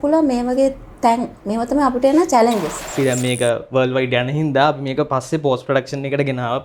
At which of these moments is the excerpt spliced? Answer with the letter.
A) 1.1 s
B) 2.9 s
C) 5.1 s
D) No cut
B